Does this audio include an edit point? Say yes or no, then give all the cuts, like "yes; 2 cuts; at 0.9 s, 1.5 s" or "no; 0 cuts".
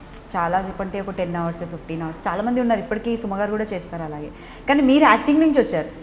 no; 0 cuts